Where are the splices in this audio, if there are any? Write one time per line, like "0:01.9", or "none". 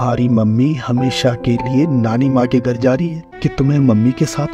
0:03.2